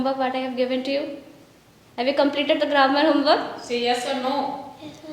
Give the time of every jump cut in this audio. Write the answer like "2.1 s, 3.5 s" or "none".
none